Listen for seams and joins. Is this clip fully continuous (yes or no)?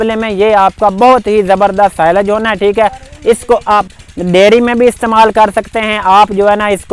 yes